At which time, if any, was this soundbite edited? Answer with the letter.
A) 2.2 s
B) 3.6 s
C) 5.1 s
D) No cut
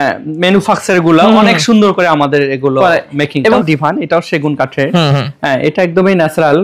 B